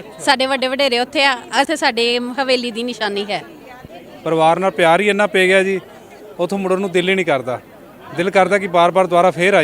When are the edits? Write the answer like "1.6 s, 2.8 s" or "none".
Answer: 1.7 s, 3.8 s